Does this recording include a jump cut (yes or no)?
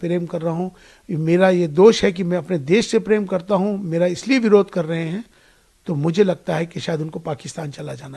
no